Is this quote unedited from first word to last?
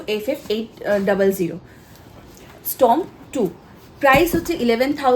yes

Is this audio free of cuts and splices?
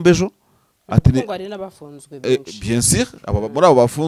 yes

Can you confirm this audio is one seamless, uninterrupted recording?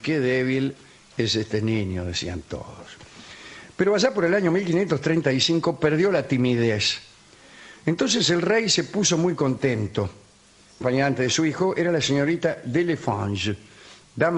yes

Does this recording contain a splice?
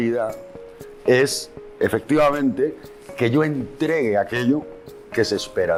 no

